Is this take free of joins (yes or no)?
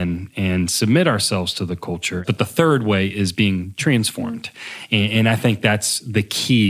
no